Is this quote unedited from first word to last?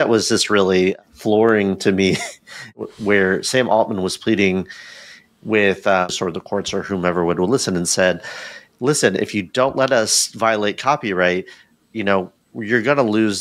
no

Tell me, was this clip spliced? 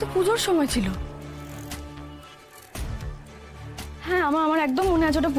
no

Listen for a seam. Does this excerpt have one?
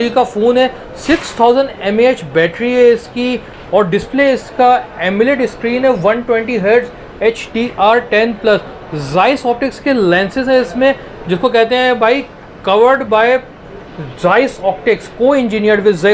no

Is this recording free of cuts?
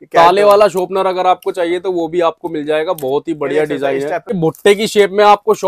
no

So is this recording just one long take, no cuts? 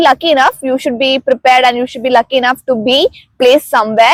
yes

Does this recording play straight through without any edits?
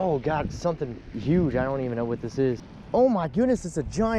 no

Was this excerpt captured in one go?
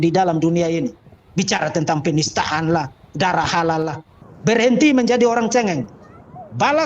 no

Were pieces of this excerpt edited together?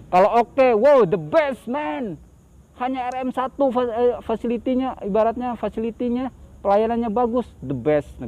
no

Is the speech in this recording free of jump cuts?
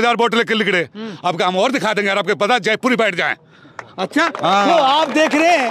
yes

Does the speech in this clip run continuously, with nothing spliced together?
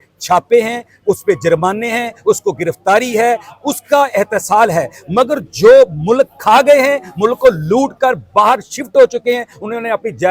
yes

